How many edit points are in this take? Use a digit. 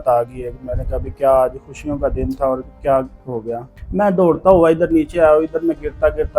1